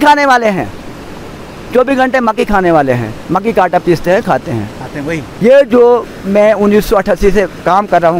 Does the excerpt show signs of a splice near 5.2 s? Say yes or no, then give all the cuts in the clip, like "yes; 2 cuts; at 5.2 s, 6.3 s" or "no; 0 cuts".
yes; 1 cut; at 5.2 s